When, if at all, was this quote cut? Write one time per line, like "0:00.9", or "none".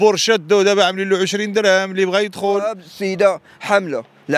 0:02.9